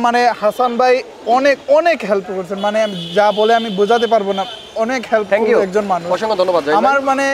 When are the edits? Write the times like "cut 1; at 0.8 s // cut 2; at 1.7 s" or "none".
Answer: none